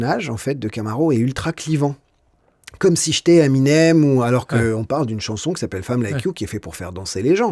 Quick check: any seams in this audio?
no; 0 cuts

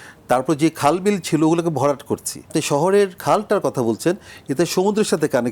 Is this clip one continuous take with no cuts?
no; 2 cuts; at 2.5 s, 3.2 s

